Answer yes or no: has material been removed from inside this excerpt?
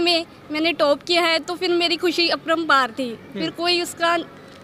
no